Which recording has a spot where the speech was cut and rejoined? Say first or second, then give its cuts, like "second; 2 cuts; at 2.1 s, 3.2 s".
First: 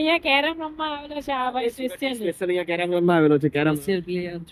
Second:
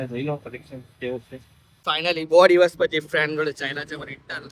second; 1 cut; at 1.8 s